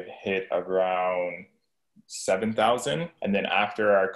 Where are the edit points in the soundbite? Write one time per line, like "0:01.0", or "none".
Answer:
0:03.1